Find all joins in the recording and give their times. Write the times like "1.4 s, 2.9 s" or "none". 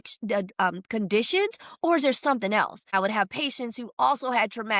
2.9 s